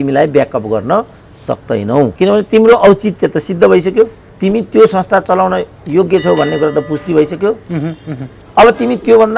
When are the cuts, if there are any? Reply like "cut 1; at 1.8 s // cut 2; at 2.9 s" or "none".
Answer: cut 1; at 2.1 s // cut 2; at 4.2 s